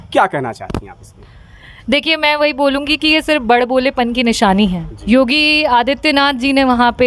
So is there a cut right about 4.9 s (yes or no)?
yes